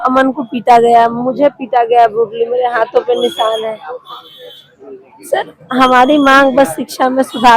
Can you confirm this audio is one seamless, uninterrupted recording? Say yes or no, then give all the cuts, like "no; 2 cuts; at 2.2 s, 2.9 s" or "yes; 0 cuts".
yes; 0 cuts